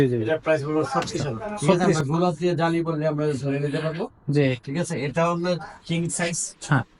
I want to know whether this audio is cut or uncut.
cut